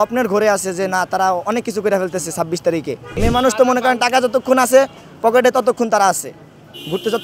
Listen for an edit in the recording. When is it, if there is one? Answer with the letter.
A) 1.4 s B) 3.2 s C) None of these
B